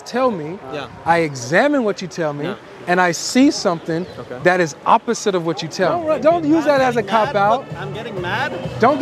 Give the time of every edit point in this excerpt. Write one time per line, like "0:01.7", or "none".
0:06.0